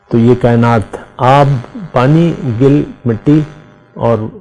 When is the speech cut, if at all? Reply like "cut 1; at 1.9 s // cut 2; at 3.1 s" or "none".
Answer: none